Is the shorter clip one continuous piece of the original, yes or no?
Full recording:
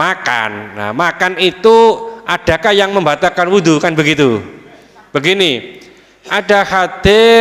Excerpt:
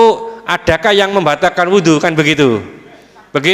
yes